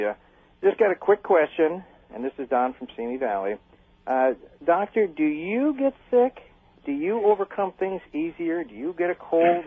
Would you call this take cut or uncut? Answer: cut